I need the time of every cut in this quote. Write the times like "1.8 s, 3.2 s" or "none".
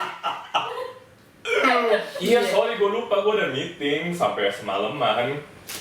2.1 s